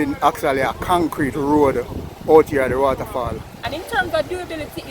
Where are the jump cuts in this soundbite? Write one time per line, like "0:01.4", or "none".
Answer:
0:03.6